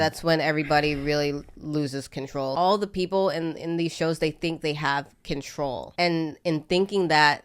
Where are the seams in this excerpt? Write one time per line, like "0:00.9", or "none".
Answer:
0:02.5
0:05.9